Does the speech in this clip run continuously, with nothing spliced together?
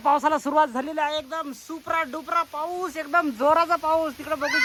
yes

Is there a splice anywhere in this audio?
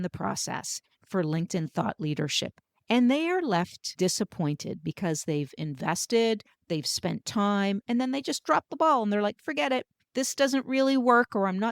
yes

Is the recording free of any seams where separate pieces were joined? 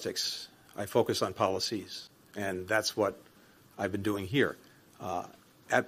yes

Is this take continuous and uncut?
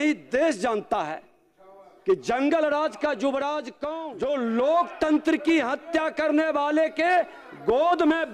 no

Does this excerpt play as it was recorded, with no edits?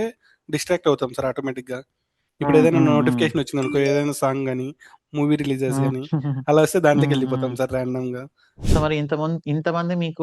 no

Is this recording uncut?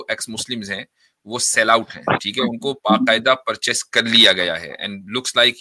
yes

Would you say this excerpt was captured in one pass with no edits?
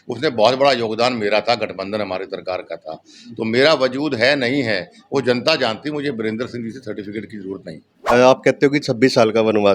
no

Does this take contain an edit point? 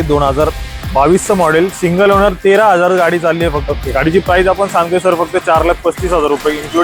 yes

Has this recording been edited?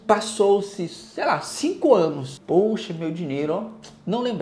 yes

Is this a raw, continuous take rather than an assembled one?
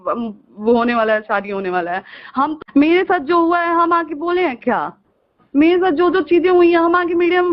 no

